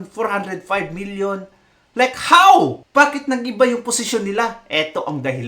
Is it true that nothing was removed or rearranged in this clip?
no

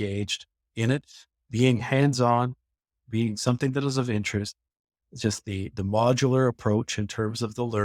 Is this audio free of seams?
yes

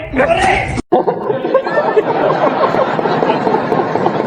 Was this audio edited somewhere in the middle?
no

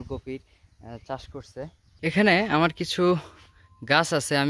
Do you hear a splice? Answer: yes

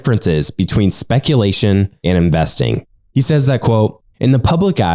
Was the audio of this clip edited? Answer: yes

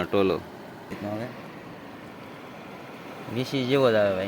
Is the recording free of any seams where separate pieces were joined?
no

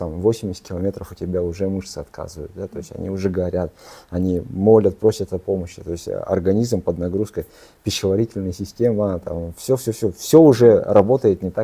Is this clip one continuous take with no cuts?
yes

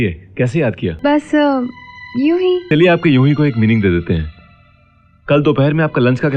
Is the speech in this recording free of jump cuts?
no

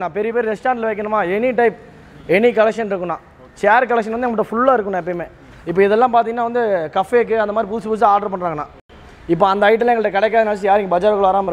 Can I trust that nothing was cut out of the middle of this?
yes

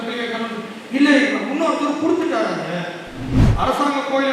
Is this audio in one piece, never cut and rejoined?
no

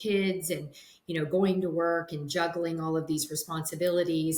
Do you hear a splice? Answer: no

